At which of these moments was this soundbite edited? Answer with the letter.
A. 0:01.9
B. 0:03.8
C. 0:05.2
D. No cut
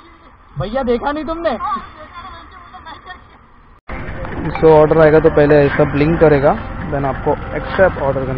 B